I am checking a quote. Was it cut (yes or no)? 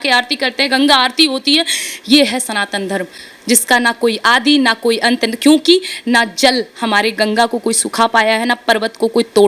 no